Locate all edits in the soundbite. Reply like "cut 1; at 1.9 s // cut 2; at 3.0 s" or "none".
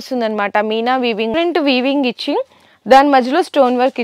cut 1; at 1.3 s